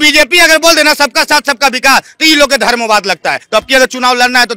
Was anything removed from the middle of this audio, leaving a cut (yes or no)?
yes